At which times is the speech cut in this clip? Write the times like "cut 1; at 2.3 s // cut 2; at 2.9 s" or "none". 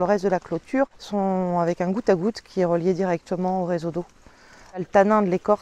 cut 1; at 1.0 s // cut 2; at 4.8 s